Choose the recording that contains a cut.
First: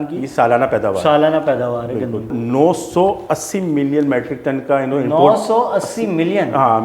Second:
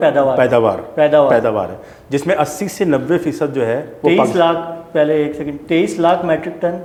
first; 1 cut; at 2.3 s

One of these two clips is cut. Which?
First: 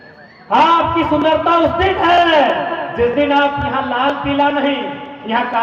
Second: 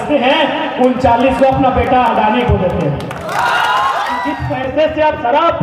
second; 1 cut; at 4.2 s

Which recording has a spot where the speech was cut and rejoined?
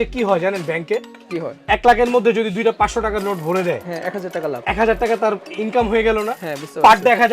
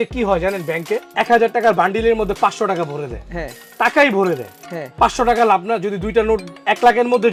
first; 1 cut; at 1.3 s

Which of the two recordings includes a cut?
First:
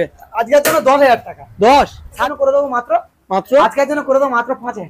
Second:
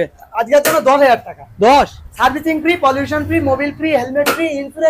first; 1 cut; at 2.2 s

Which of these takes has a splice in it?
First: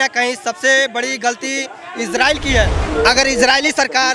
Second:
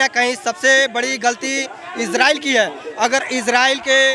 first; 1 cut; at 2.8 s

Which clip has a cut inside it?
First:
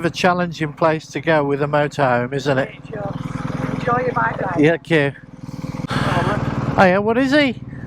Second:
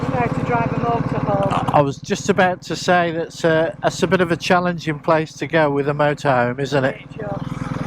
first; 1 cut; at 5.9 s

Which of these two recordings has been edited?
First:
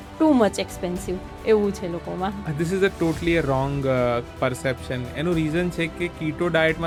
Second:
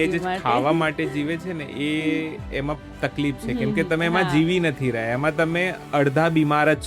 second; 1 cut; at 5.8 s

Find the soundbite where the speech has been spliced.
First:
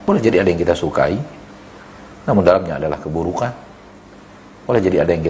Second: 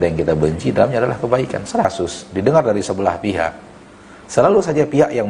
second; 1 cut; at 1.8 s

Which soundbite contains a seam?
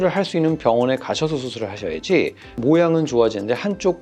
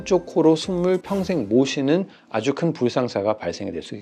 first; 1 cut; at 2.6 s

